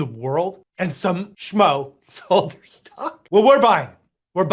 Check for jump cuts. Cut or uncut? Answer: cut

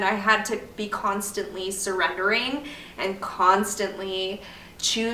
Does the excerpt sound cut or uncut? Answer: uncut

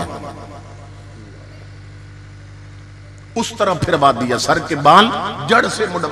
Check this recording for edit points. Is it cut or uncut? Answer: uncut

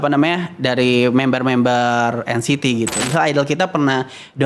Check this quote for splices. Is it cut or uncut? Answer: cut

